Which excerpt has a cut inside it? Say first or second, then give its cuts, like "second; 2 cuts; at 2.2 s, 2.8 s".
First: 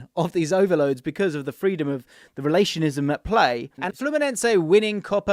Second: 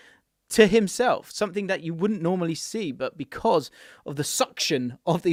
first; 1 cut; at 3.8 s